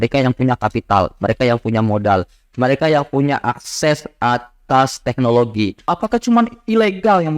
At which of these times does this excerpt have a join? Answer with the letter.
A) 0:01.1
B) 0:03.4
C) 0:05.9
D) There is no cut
C